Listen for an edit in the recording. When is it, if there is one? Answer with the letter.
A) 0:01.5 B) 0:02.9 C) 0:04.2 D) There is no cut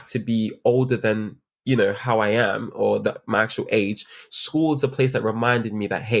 D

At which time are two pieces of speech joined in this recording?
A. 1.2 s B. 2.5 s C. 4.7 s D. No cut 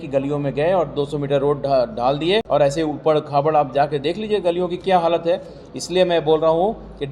B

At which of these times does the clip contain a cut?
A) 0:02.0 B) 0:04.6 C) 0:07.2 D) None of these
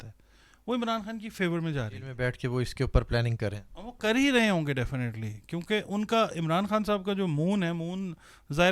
A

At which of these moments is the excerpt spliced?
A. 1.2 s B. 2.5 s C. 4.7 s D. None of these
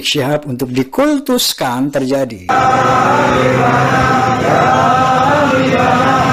B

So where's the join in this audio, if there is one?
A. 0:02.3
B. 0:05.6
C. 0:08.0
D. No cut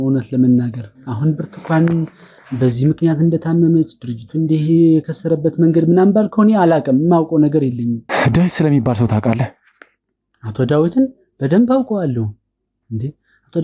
C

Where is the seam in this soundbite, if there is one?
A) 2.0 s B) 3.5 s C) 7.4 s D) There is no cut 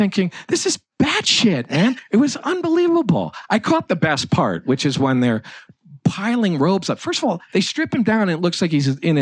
A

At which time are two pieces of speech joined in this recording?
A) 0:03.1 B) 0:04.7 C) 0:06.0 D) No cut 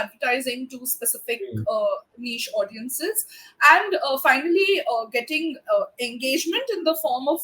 D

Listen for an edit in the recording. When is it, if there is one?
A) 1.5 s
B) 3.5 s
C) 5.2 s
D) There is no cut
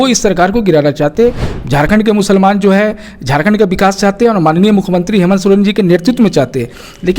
A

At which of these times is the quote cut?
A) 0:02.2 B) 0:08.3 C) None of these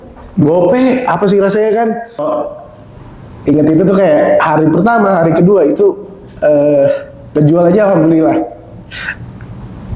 A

